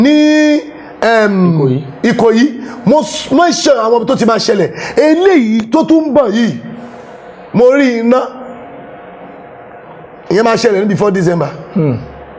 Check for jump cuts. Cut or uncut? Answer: uncut